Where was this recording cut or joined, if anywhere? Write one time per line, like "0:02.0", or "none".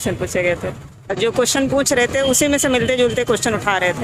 0:00.9